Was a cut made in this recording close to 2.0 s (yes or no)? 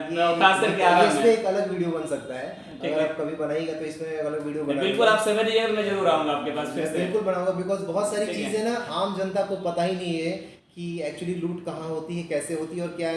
no